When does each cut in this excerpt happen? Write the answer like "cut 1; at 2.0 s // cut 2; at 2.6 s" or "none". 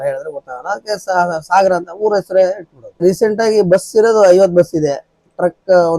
cut 1; at 3.0 s